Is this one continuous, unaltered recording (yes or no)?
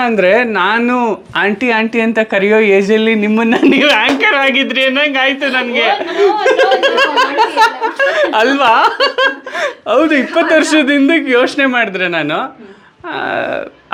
yes